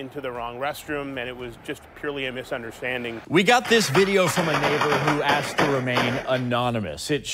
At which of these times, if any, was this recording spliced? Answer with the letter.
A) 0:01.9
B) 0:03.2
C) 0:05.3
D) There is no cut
B